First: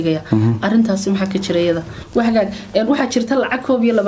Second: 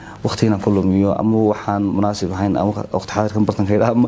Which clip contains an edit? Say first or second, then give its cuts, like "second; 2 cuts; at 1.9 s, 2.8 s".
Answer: first; 1 cut; at 1.9 s